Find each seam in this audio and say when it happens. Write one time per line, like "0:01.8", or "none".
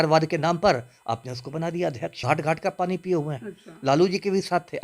0:02.2